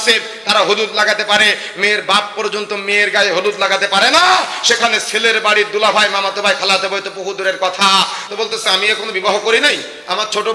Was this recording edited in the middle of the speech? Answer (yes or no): yes